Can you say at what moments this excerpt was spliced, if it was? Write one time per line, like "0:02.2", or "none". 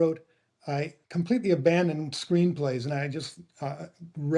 0:01.0

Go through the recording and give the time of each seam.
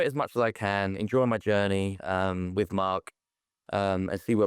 none

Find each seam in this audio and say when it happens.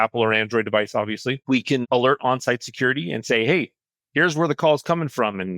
0:01.8

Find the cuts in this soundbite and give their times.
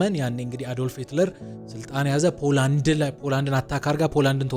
none

